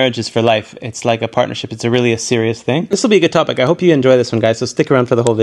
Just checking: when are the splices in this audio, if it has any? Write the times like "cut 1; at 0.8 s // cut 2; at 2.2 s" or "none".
cut 1; at 2.9 s